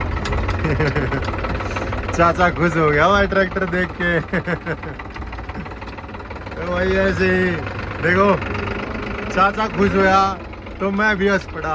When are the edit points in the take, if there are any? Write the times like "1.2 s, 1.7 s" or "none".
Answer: none